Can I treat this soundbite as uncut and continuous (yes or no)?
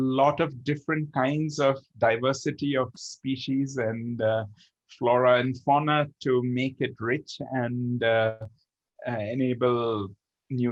yes